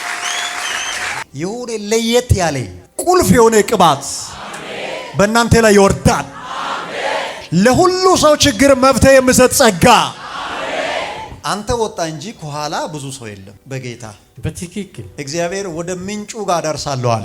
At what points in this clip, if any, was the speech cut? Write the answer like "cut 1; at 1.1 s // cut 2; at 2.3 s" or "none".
cut 1; at 1.2 s // cut 2; at 11.4 s // cut 3; at 15.0 s